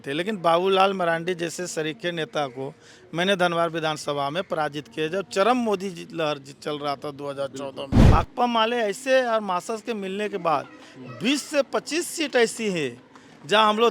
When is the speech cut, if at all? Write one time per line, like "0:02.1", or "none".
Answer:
0:08.0